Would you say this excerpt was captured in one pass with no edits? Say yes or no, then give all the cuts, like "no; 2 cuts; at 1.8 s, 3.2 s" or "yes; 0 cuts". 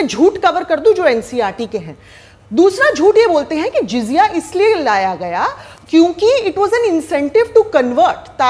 yes; 0 cuts